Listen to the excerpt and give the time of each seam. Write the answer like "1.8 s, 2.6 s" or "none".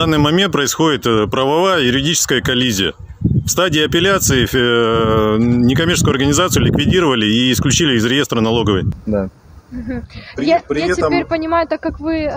none

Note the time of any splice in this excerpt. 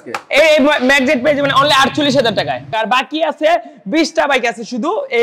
2.7 s

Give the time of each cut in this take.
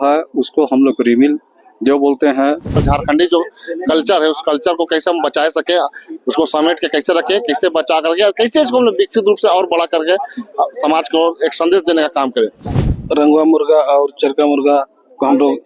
2.8 s, 12.8 s

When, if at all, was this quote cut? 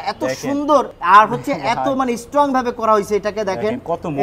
0.9 s

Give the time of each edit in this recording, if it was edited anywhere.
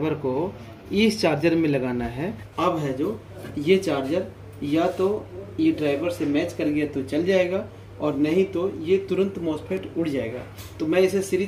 2.4 s

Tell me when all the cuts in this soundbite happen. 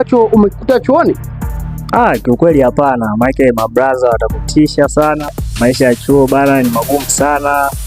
5.4 s

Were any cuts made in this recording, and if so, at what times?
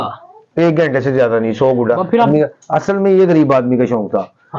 2.3 s

